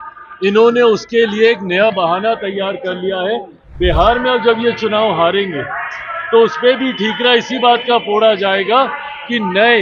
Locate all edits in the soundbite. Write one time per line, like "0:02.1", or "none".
none